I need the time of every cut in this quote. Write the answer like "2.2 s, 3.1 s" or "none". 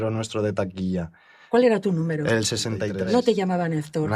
2.9 s